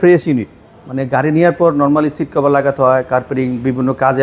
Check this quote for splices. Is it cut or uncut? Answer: uncut